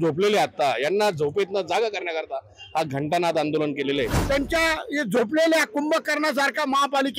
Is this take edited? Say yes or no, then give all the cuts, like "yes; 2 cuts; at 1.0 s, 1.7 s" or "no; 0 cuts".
yes; 1 cut; at 4.2 s